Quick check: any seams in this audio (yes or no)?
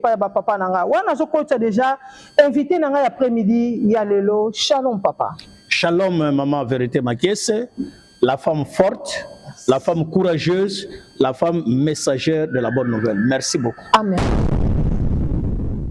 yes